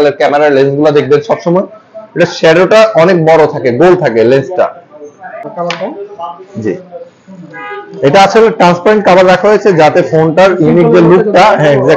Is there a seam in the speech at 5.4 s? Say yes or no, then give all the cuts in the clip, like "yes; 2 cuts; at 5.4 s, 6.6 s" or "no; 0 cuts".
yes; 1 cut; at 5.4 s